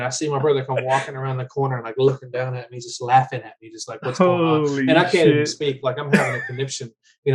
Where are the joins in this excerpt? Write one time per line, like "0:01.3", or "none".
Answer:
none